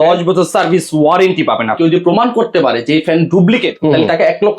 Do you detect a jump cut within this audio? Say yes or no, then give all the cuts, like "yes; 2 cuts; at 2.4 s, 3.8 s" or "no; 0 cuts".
yes; 2 cuts; at 1.8 s, 3.7 s